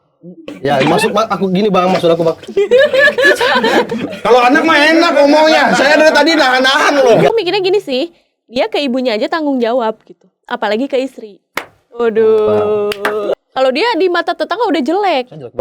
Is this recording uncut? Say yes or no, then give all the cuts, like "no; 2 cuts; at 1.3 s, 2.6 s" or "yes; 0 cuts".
no; 2 cuts; at 7.3 s, 13.3 s